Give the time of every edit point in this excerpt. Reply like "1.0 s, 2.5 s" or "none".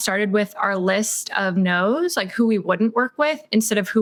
none